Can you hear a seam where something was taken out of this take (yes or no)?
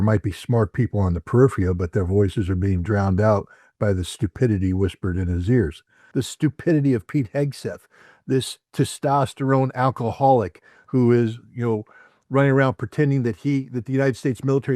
yes